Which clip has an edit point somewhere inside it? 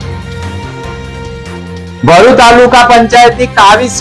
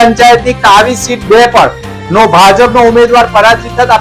first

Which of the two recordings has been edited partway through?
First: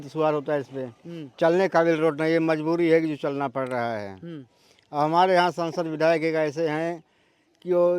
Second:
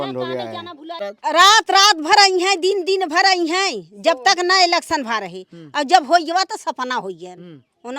second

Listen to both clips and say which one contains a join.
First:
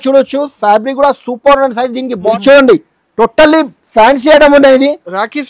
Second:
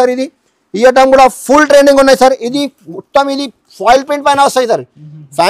first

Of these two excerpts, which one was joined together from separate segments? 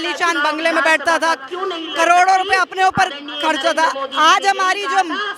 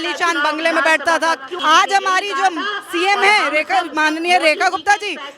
second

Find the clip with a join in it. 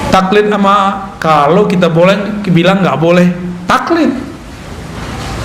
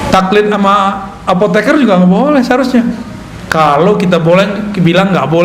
first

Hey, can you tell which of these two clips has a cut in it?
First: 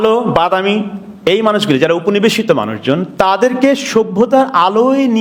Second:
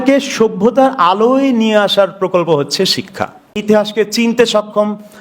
second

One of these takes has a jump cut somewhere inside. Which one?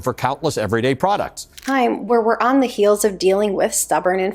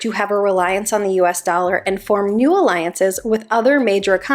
first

